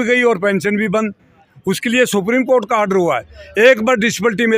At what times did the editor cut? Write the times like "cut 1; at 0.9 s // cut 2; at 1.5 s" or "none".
none